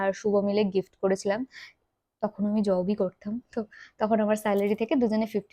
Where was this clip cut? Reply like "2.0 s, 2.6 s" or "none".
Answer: none